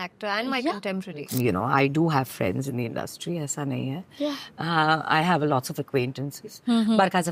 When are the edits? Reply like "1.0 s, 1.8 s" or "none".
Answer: 1.3 s

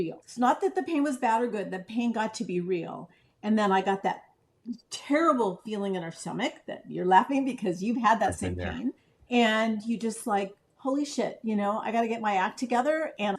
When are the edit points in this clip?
9.1 s

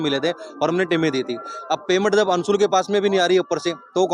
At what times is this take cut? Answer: none

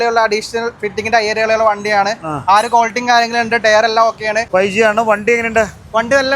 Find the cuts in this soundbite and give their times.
4.5 s

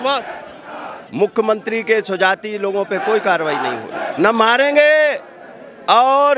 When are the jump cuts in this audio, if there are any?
4.1 s

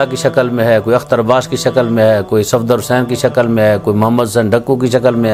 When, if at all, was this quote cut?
none

